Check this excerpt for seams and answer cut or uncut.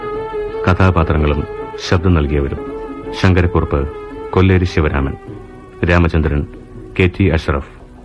cut